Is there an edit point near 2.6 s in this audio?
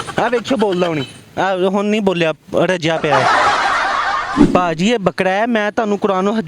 no; 1 cut; at 4.3 s

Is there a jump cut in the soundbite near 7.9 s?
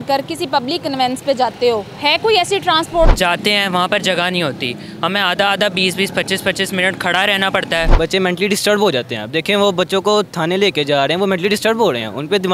yes; 2 cuts; at 3.1 s, 7.9 s

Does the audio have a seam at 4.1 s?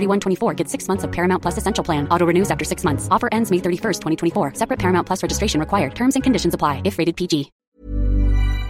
no; 1 cut; at 7.6 s

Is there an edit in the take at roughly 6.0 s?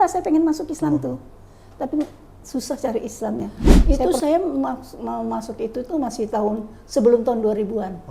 no; 1 cut; at 3.7 s

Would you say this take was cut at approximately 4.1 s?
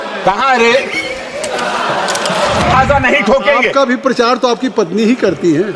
no; 1 cut; at 2.7 s

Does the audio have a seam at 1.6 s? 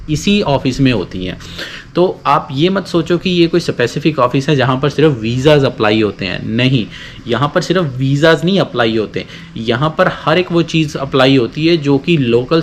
no; 0 cuts

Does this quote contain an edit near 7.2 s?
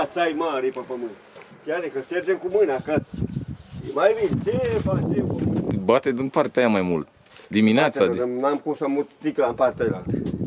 no; 1 cut; at 5.7 s

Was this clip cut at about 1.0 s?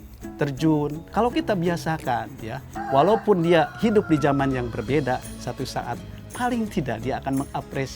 yes; 3 cuts; at 1.0 s, 2.7 s, 6.2 s

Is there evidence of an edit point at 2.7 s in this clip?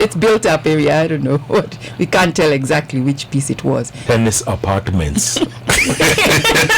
no; 1 cut; at 4.0 s

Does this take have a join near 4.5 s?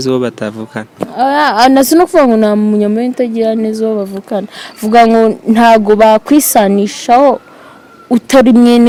no; 0 cuts

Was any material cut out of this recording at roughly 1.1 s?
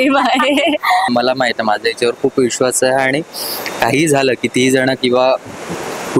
yes; 1 cut; at 1.1 s

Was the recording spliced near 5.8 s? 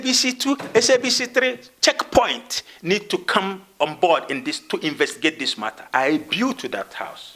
yes; 1 cut; at 5.8 s

